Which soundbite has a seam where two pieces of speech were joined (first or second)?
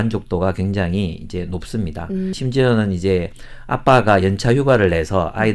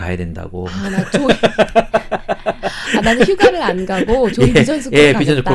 first